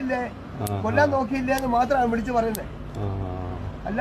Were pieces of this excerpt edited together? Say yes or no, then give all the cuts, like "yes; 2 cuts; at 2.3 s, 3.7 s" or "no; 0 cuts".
no; 0 cuts